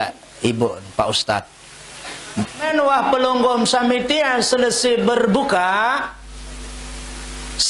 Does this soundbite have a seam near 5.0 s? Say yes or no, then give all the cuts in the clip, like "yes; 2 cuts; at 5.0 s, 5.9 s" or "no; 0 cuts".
no; 1 cut; at 2.6 s